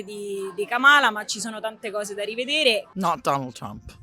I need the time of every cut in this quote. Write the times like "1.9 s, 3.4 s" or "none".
2.9 s